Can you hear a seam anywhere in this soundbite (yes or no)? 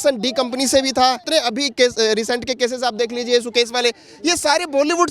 yes